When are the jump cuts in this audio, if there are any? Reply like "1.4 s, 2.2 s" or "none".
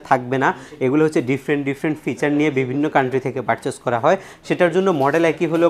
none